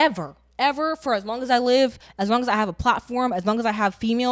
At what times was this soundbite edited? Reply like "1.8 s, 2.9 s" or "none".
none